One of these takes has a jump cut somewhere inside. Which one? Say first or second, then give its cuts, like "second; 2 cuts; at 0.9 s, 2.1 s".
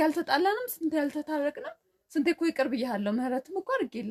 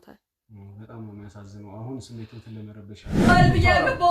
second; 1 cut; at 3.2 s